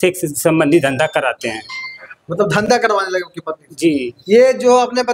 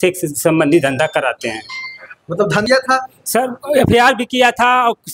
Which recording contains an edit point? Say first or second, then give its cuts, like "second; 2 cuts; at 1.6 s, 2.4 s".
second; 1 cut; at 2.6 s